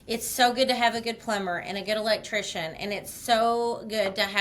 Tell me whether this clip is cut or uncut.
uncut